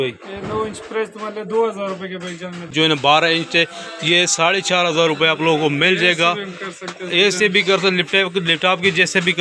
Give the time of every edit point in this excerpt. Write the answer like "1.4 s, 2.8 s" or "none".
2.7 s